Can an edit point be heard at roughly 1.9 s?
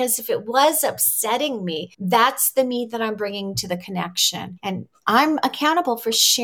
yes; 2 cuts; at 1.9 s, 4.5 s

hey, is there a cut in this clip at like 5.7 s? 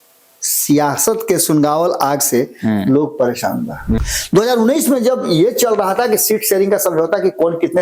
no; 1 cut; at 4.0 s

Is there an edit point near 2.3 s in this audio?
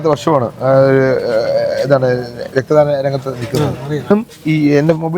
no; 1 cut; at 4.1 s

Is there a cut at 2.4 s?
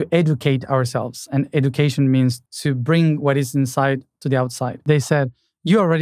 yes; 2 cuts; at 2.4 s, 4.8 s

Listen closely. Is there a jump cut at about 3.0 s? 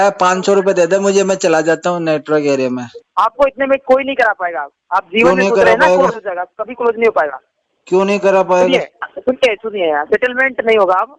yes; 2 cuts; at 3.0 s, 9.0 s

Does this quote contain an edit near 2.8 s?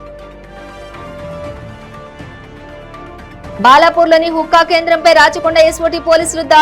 yes; 1 cut; at 2.8 s

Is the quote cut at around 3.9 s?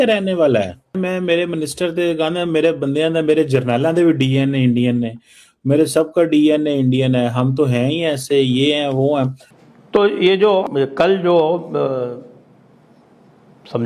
no; 3 cuts; at 0.9 s, 9.5 s, 10.6 s

